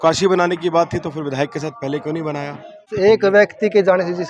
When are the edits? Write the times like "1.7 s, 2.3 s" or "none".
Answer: 2.7 s